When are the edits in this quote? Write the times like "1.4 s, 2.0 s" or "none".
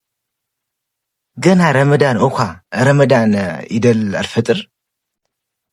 3.6 s